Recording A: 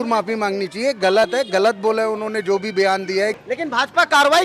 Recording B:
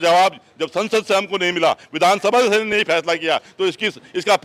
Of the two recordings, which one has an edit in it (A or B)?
A